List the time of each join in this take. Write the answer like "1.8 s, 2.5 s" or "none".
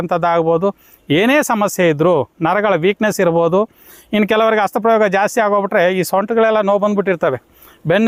none